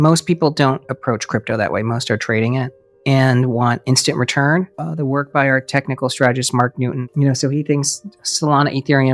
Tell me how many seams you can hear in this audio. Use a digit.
0